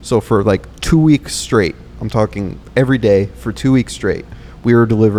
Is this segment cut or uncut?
uncut